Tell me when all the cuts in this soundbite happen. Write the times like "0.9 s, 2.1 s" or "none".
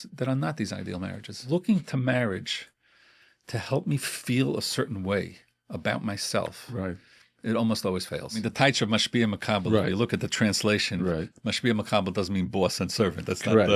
1.4 s, 8.4 s